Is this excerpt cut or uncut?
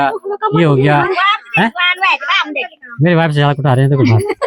uncut